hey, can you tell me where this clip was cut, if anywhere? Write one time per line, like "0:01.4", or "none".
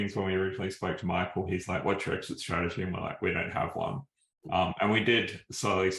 none